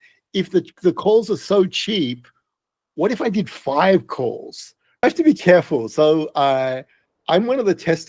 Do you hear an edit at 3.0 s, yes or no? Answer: no